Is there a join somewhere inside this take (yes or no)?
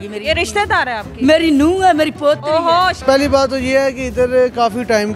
yes